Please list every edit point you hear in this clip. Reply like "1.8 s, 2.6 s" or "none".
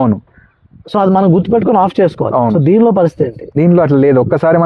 none

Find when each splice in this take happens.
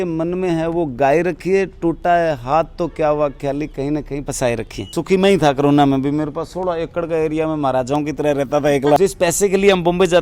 4.8 s, 9.0 s

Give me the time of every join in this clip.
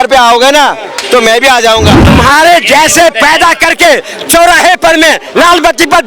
2.0 s

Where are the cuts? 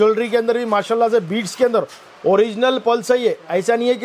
none

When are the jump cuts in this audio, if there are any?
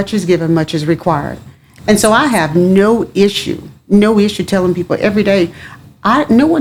none

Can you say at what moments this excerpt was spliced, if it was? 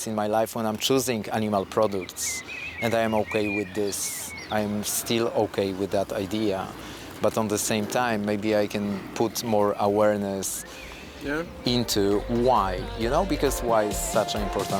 none

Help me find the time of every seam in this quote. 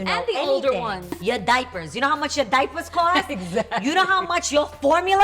1.2 s

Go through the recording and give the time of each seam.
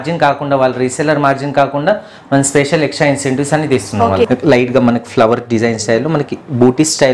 4.3 s

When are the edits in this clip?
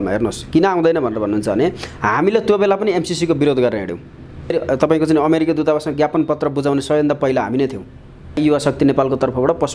4.5 s, 8.4 s

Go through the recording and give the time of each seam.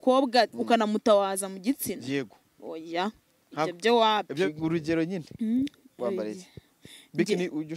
4.5 s

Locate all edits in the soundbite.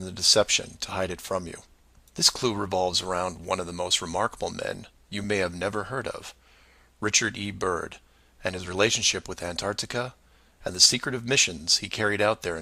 none

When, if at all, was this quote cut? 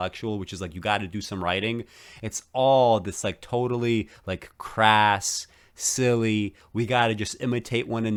none

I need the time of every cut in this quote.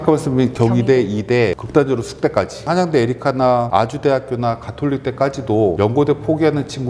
1.6 s, 2.6 s, 3.7 s, 5.8 s

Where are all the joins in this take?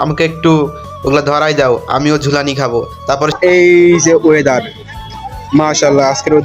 3.3 s

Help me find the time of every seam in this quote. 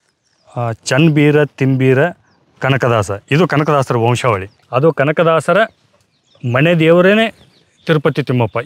4.5 s

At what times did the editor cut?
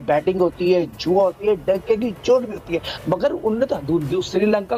none

